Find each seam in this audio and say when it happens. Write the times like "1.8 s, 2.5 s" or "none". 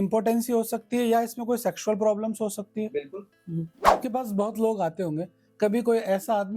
3.8 s